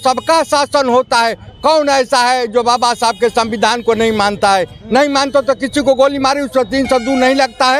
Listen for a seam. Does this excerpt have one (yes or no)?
no